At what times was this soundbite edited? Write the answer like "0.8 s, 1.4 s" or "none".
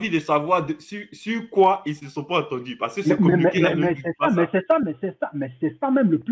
none